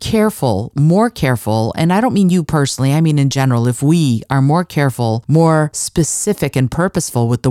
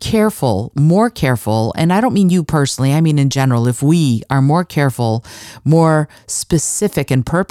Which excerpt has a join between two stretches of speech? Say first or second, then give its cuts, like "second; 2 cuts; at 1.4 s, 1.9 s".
first; 2 cuts; at 5.2 s, 5.8 s